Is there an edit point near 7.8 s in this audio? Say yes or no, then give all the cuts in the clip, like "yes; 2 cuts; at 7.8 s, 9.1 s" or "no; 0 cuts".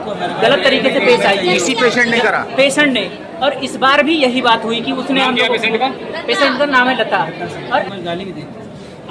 yes; 1 cut; at 7.8 s